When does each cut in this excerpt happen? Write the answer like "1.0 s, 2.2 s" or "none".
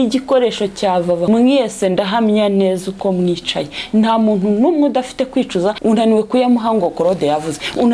1.2 s, 5.8 s